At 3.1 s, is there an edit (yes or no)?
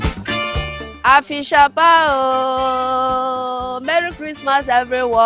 no